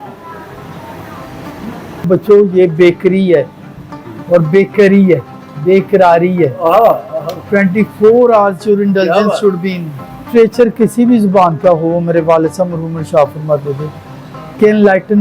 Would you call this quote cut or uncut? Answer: cut